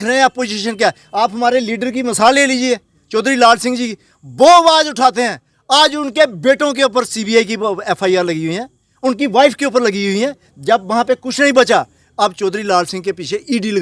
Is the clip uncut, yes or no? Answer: yes